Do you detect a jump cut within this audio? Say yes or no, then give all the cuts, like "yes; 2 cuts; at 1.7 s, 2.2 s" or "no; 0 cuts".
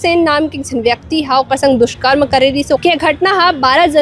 yes; 1 cut; at 2.8 s